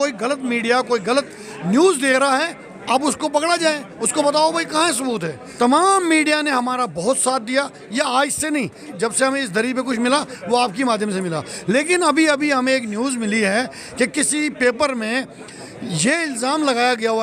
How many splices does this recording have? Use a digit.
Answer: 2